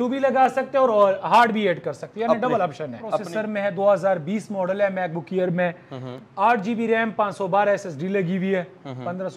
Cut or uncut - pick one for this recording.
cut